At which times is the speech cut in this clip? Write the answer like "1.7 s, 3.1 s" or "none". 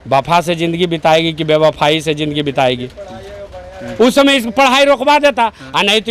none